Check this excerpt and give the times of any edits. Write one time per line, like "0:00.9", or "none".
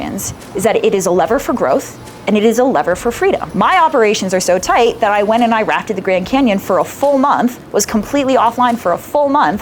0:03.5